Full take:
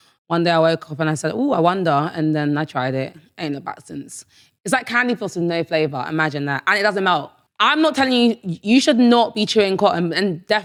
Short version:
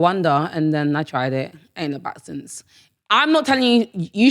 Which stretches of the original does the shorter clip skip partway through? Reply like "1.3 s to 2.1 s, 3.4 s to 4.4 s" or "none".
4.5 s to 7.4 s